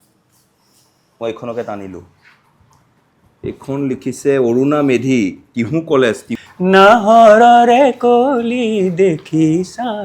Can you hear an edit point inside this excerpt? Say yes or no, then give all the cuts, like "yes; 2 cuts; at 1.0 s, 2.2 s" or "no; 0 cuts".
yes; 1 cut; at 6.3 s